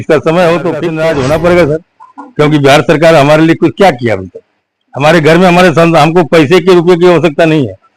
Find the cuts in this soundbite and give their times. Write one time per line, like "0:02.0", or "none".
0:00.9